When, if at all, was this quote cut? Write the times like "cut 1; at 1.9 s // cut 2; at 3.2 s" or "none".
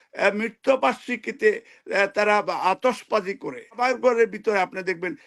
cut 1; at 3.8 s